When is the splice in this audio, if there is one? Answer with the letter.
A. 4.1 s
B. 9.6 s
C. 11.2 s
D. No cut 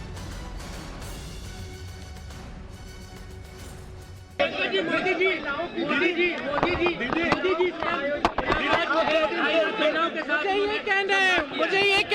C